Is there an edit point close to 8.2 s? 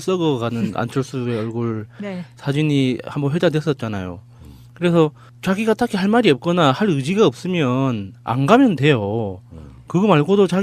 no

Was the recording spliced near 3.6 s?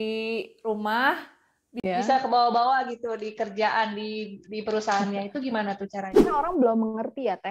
no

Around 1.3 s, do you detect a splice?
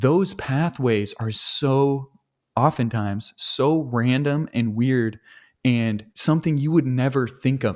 no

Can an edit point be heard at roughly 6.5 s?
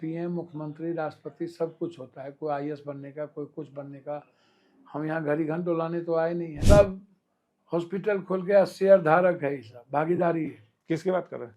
yes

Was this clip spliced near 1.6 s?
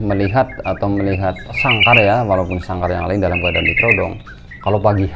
yes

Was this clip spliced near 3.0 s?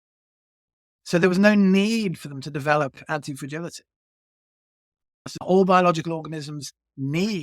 no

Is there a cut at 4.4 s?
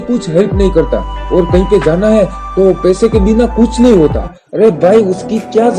yes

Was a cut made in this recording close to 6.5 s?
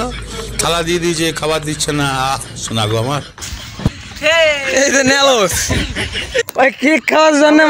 yes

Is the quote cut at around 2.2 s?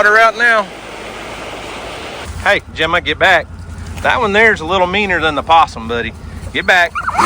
yes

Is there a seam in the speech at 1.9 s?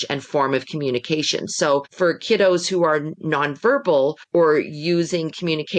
yes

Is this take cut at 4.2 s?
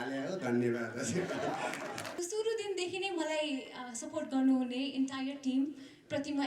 no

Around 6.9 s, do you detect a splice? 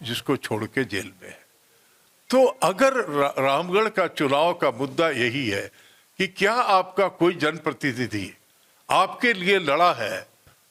no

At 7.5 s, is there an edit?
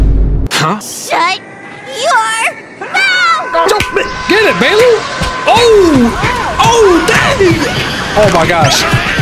no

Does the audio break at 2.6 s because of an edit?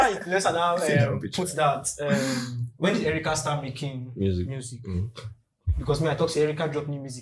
yes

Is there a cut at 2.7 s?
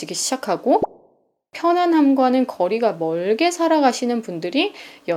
no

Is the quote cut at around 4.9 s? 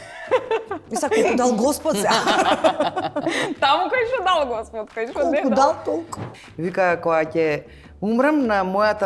no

